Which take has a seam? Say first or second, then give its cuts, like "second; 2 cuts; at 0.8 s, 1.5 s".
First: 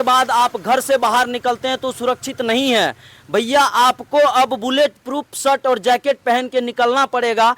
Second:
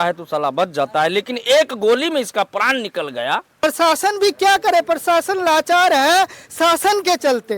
second; 1 cut; at 3.6 s